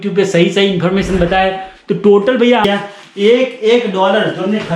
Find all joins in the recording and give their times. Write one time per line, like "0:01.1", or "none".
0:02.6